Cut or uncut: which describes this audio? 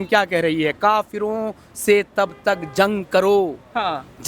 uncut